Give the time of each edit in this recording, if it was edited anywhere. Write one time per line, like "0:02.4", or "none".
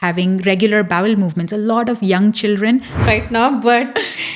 0:03.0